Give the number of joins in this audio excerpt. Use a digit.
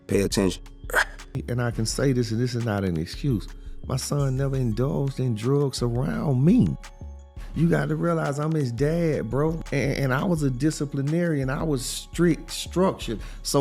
1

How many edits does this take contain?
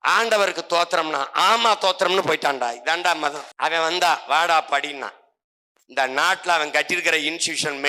1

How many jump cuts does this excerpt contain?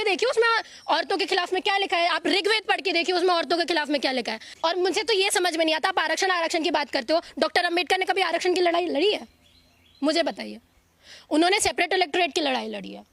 1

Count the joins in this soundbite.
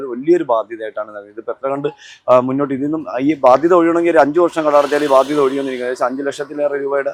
0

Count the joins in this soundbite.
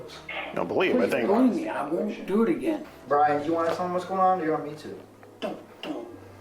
1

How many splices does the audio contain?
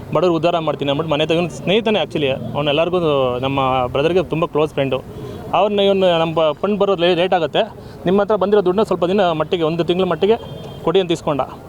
0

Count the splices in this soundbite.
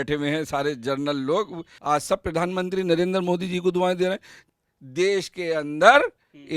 2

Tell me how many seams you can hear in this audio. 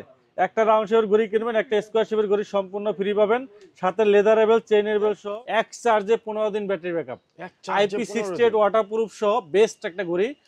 1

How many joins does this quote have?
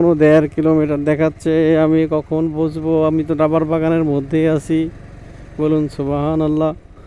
0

